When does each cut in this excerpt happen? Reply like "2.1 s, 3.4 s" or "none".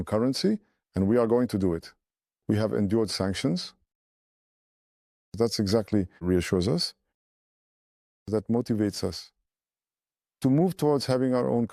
6.2 s